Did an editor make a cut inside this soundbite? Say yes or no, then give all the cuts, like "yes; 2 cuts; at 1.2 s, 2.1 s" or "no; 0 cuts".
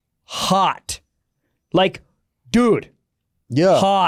no; 0 cuts